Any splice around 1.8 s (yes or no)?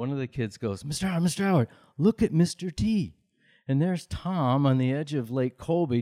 no